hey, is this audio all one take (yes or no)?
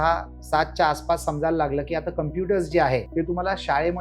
no